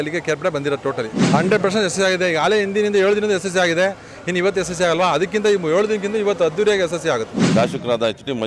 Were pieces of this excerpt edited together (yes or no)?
yes